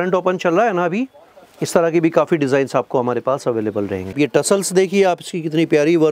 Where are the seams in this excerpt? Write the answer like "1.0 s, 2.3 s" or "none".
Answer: 4.1 s